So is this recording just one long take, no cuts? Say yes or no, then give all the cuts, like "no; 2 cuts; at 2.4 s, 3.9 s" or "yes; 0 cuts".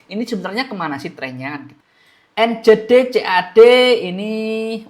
no; 1 cut; at 1.7 s